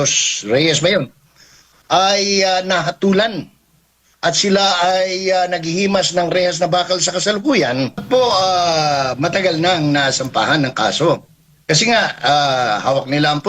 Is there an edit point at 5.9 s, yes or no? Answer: no